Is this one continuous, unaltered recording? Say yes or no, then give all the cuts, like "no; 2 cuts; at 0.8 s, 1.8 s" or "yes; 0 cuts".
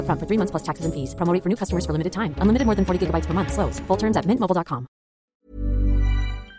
no; 1 cut; at 5.5 s